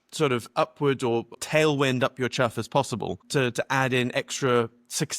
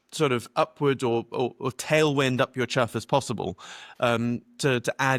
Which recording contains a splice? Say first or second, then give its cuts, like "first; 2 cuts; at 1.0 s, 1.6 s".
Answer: first; 2 cuts; at 1.3 s, 3.2 s